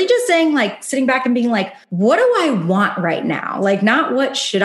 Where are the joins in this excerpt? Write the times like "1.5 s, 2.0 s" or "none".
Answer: 1.8 s